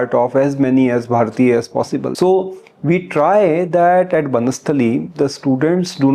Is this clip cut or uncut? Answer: cut